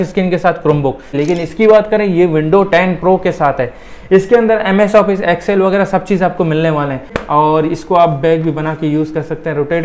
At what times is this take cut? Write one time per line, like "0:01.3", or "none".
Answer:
0:01.2
0:07.2